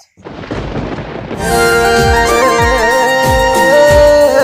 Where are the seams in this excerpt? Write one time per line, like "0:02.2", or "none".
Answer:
0:01.4